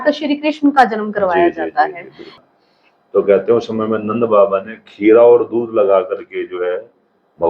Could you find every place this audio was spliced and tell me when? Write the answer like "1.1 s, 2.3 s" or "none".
2.4 s